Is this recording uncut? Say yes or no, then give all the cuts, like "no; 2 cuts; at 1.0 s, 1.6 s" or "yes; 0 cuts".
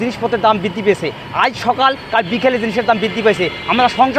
yes; 0 cuts